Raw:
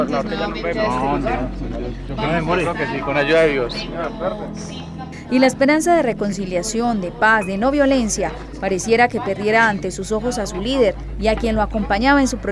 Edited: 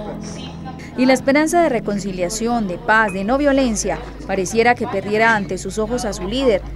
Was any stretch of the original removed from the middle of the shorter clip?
no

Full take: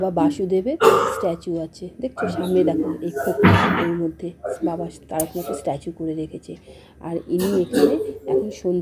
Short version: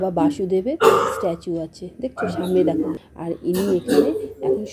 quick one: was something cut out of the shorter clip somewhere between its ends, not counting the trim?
yes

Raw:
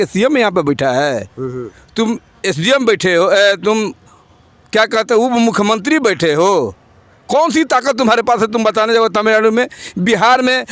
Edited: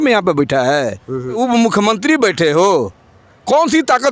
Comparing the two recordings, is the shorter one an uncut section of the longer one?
no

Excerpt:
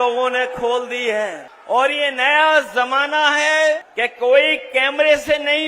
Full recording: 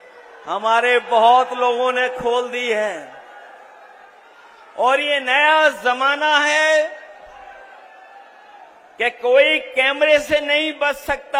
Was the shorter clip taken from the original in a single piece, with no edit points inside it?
no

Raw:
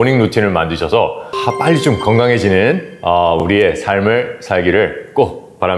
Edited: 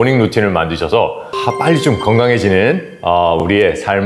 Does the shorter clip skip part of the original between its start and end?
no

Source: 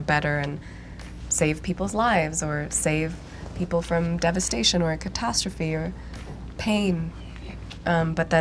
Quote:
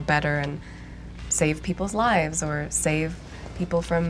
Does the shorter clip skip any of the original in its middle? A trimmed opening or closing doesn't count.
no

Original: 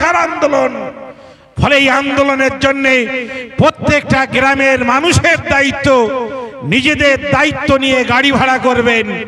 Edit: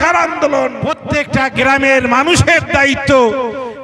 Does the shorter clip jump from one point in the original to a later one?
yes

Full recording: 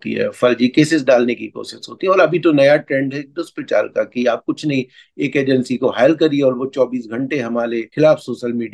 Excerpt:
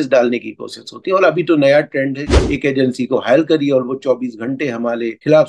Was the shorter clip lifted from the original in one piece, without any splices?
no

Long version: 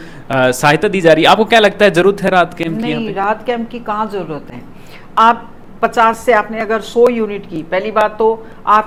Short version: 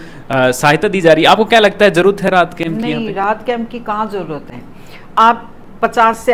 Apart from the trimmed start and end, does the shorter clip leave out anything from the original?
no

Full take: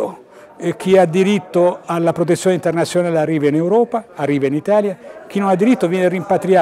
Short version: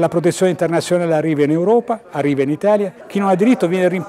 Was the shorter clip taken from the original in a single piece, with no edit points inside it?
no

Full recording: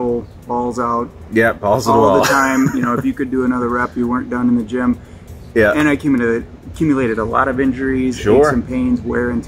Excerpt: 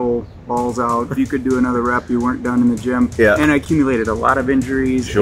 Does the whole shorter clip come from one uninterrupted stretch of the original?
no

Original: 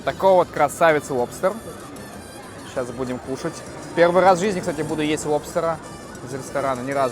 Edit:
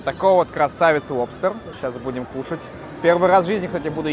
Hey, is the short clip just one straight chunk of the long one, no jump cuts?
no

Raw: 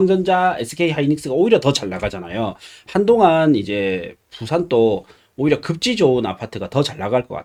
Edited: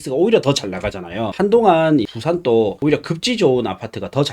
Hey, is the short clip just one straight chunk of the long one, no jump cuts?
no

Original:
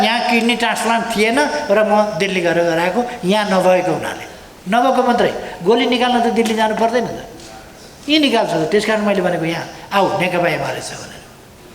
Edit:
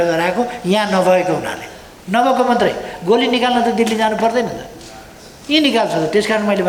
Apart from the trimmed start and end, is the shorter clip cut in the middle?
no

